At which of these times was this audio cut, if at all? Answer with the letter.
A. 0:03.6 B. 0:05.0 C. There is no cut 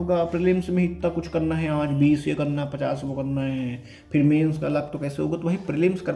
C